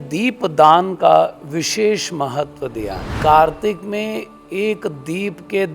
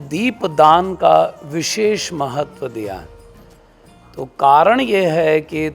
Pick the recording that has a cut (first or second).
first